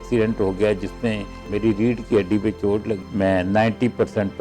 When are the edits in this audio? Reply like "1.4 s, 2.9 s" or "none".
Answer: 1.4 s, 3.0 s